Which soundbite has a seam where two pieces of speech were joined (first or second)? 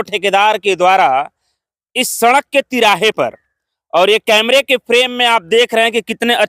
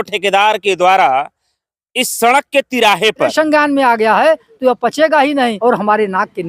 second